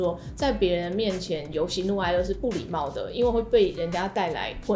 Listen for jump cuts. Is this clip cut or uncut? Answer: uncut